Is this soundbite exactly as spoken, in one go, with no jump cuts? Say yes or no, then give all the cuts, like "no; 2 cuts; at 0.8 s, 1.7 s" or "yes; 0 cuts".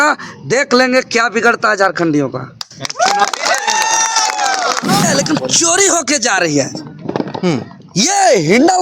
no; 1 cut; at 5.1 s